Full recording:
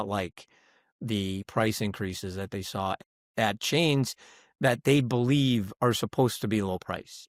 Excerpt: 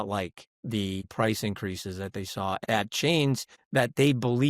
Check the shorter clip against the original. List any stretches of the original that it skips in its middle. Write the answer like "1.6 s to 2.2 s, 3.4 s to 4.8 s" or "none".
1.0 s to 1.4 s, 3.0 s to 3.3 s, 4.2 s to 4.4 s